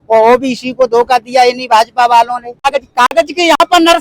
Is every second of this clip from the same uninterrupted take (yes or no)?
no